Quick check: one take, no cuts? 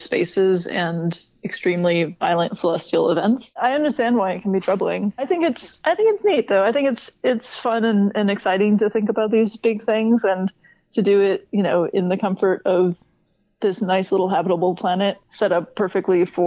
no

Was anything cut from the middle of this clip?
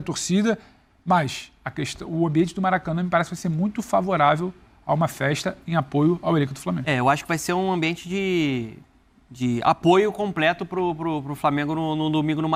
no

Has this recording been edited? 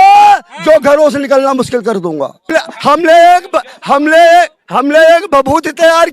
yes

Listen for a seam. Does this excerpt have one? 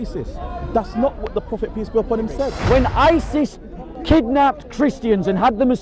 yes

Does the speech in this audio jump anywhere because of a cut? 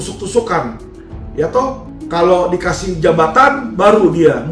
yes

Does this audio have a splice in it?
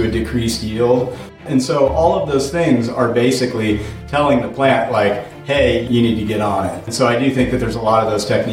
yes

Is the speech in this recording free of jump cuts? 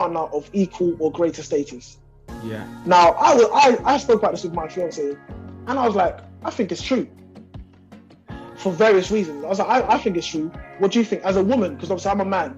yes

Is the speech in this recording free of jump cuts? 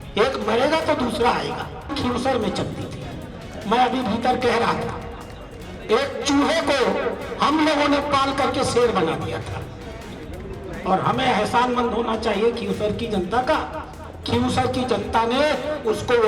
no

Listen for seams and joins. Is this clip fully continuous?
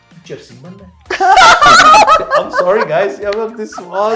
yes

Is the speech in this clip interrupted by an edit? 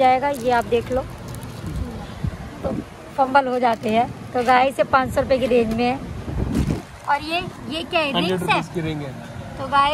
no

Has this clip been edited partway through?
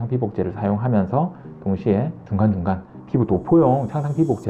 yes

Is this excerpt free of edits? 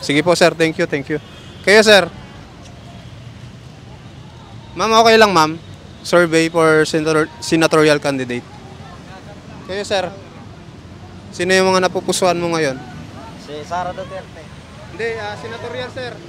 yes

